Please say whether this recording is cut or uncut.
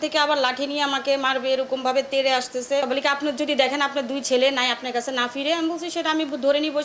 cut